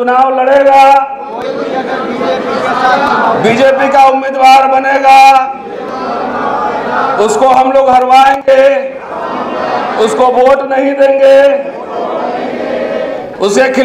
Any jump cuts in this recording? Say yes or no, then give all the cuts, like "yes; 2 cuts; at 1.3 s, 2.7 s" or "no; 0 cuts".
no; 0 cuts